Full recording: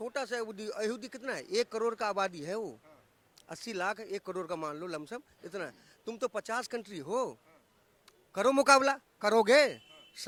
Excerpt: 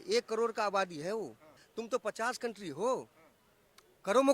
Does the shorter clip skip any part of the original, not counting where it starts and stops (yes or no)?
yes